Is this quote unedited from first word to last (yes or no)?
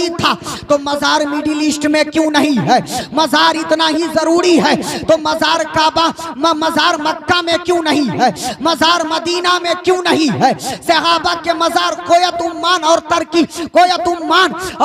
yes